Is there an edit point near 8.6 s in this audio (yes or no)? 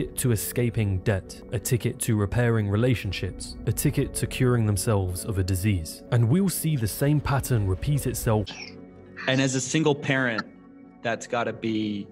yes